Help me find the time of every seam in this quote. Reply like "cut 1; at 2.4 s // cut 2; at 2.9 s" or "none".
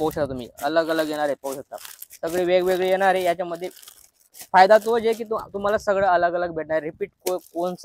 none

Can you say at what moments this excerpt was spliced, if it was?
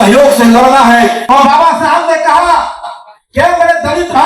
cut 1; at 1.2 s

